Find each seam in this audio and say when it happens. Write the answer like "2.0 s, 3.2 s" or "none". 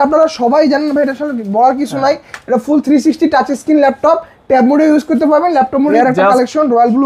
5.9 s